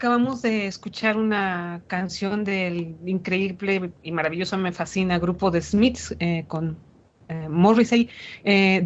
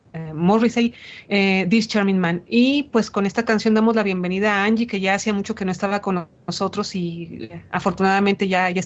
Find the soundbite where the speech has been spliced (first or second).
second